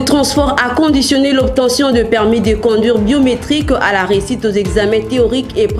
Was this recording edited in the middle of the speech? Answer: no; 0 cuts

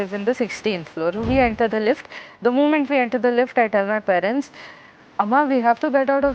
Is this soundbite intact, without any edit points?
yes; 0 cuts

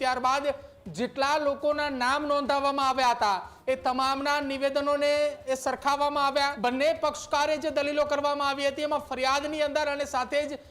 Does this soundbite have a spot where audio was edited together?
yes; 1 cut; at 6.5 s

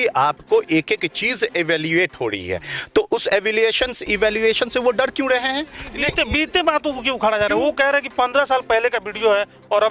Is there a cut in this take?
no; 0 cuts

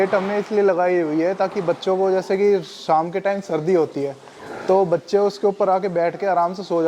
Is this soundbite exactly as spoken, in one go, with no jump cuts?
yes; 0 cuts

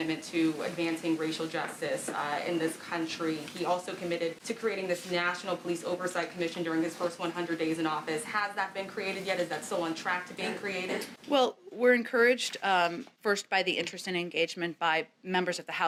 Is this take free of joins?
yes; 0 cuts

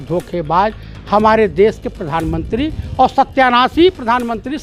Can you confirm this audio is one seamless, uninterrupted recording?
yes; 0 cuts

